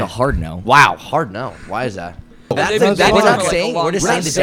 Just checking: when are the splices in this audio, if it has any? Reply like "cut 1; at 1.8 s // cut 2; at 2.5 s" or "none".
cut 1; at 2.5 s